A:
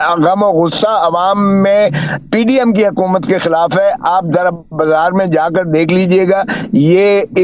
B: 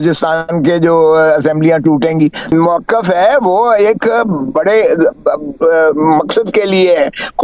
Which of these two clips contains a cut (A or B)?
B